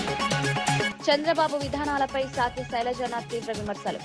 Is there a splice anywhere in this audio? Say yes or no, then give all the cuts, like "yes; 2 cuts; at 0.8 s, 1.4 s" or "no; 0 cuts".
yes; 1 cut; at 0.9 s